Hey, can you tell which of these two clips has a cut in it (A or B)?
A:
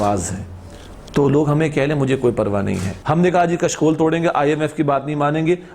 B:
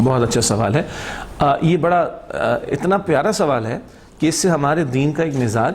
A